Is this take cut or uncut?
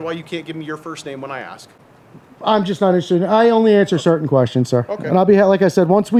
uncut